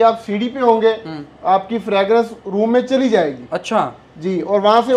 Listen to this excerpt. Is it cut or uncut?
uncut